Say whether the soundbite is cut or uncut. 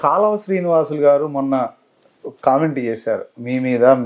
uncut